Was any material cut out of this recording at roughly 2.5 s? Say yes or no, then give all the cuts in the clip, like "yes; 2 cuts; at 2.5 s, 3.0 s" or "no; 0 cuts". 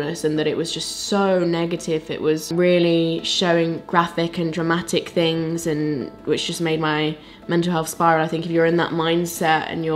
yes; 1 cut; at 2.5 s